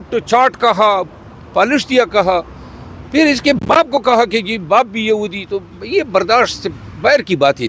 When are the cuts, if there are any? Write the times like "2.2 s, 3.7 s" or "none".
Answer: none